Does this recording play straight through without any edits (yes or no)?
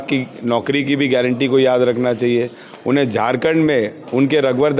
yes